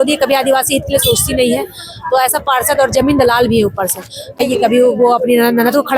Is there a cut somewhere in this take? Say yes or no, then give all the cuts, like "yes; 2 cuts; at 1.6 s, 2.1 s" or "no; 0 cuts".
yes; 1 cut; at 4.4 s